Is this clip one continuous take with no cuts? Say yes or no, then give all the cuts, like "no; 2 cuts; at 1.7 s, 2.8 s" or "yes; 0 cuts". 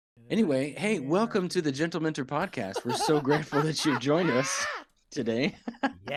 yes; 0 cuts